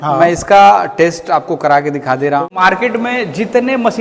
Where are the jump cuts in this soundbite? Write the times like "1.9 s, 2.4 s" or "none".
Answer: 2.5 s